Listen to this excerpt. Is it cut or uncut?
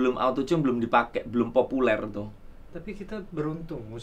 uncut